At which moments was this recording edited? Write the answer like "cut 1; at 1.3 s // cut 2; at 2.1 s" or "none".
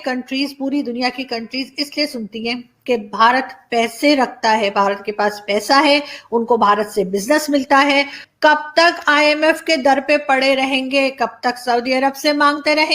cut 1; at 8.2 s